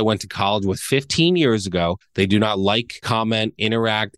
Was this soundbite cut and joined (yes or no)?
yes